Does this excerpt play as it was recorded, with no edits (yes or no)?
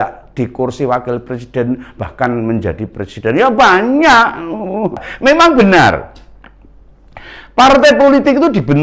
no